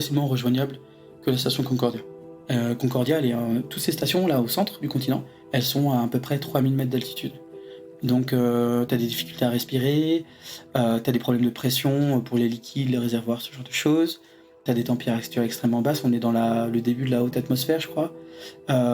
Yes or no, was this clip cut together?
yes